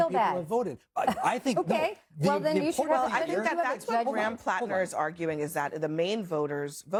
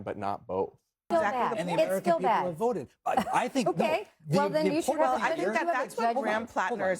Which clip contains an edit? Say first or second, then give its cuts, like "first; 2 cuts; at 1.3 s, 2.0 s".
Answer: second; 1 cut; at 1.1 s